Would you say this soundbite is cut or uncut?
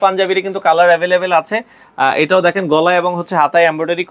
uncut